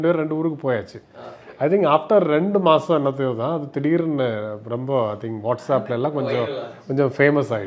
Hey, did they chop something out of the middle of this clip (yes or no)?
no